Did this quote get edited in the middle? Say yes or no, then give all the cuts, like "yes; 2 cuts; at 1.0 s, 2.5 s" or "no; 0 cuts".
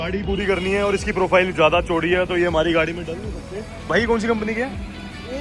yes; 1 cut; at 3.9 s